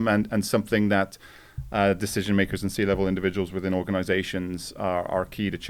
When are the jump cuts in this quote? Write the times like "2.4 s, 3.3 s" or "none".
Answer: none